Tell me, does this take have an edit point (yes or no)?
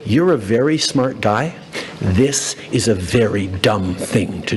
no